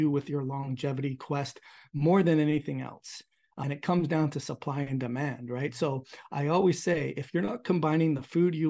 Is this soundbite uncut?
no; 1 cut; at 3.6 s

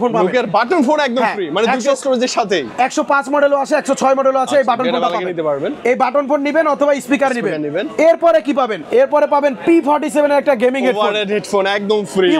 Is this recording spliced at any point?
no; 0 cuts

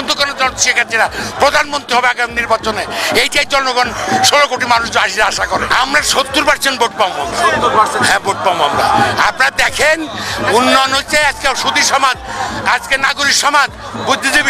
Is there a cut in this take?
no; 0 cuts

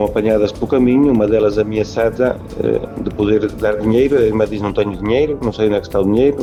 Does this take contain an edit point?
no; 0 cuts

